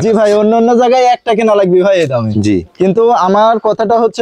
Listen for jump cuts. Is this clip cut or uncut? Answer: uncut